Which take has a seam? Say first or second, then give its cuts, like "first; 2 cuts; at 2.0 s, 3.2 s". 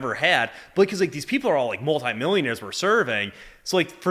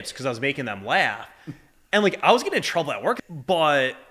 second; 1 cut; at 3.2 s